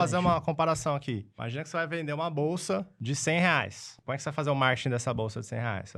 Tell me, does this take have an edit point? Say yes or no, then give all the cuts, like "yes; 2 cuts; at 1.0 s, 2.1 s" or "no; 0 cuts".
yes; 3 cuts; at 1.4 s, 3.0 s, 4.0 s